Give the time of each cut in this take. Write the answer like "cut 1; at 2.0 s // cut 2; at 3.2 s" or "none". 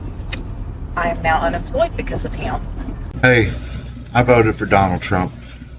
cut 1; at 3.1 s